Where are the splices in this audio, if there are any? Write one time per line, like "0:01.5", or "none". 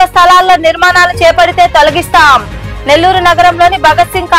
none